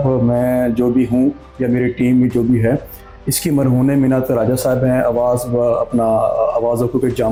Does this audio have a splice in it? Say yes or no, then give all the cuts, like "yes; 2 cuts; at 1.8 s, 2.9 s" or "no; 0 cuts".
no; 0 cuts